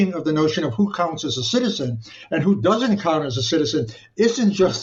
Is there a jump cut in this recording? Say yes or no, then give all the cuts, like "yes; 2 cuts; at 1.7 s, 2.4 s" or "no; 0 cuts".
no; 0 cuts